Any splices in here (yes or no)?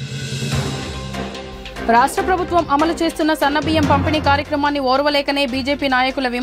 yes